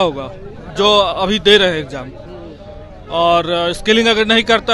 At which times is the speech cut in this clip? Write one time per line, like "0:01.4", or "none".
none